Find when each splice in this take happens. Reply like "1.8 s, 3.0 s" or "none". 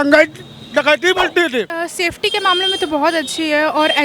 1.8 s